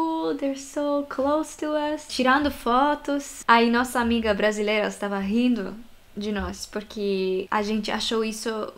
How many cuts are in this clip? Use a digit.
1